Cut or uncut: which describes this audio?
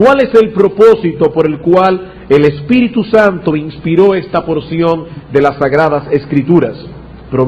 cut